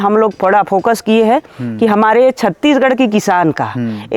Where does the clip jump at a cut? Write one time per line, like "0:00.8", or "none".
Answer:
none

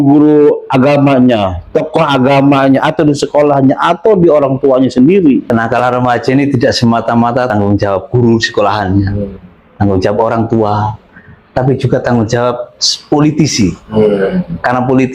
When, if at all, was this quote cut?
0:05.4
0:07.5

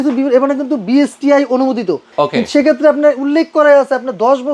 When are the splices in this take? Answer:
0:02.1

